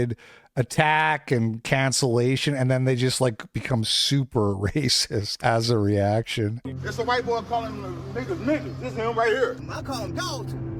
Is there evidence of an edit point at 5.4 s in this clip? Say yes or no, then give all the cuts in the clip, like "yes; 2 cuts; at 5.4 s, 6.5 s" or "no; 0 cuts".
yes; 2 cuts; at 5.4 s, 6.6 s